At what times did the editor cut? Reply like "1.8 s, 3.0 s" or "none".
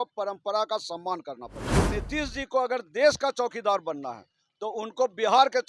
1.6 s